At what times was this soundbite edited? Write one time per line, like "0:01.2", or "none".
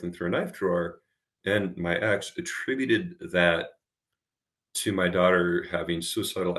0:01.3